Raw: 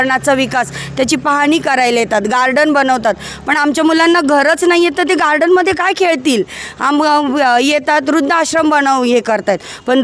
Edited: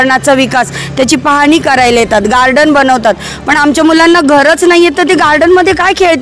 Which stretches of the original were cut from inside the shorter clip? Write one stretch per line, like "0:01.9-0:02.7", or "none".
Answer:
none